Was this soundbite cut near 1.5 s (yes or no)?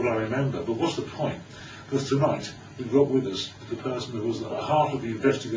no